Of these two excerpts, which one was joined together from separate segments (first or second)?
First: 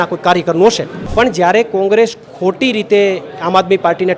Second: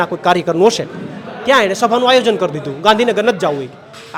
first